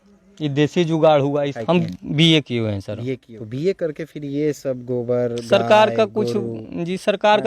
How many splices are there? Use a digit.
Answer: 2